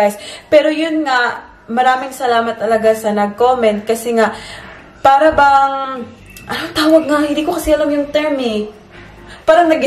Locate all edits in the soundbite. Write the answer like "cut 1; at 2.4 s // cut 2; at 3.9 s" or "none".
none